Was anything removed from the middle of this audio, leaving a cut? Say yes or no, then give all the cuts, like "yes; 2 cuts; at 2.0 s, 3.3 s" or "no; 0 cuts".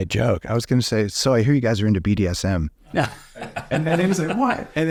no; 0 cuts